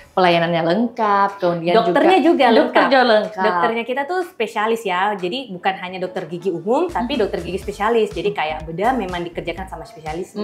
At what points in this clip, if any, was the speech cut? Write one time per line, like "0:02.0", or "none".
none